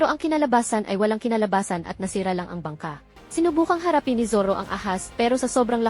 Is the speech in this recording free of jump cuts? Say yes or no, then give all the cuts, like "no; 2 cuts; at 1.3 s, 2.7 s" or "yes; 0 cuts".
no; 1 cut; at 3.1 s